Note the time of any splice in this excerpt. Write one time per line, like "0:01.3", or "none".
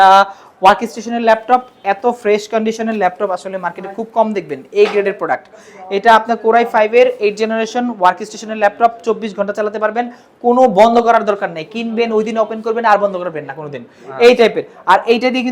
none